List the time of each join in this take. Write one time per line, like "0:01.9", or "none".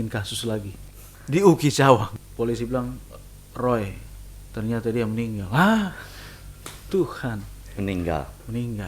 0:02.2